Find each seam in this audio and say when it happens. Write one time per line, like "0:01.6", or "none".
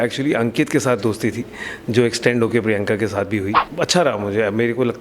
0:03.6

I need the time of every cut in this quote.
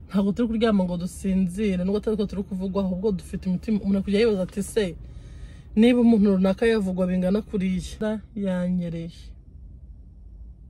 0:08.0

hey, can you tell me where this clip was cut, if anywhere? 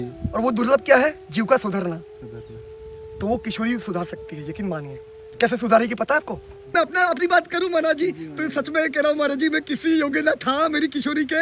0:06.7

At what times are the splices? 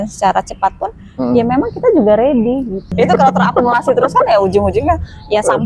0:02.9

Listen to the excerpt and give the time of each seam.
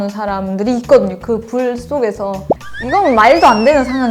0:02.6

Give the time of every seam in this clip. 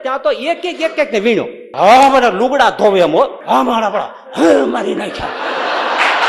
0:01.6
0:03.4

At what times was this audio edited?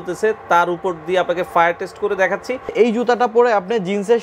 0:02.7

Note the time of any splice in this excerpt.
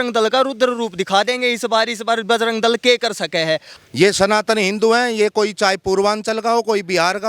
0:03.7

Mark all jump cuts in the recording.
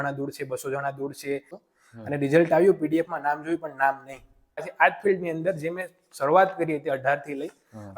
0:01.6
0:04.7

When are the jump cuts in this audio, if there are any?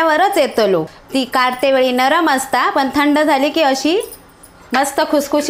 0:01.0

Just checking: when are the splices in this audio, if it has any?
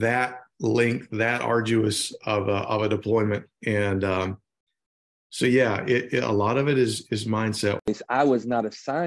0:07.9

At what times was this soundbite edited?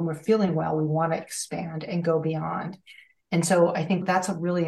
none

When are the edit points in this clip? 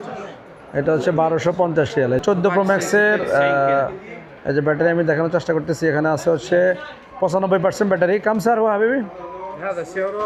0:02.2

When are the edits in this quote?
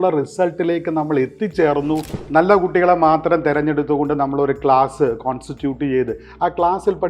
0:02.2

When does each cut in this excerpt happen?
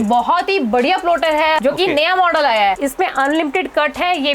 0:01.6
0:02.8

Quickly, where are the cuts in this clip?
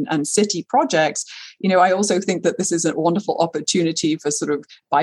none

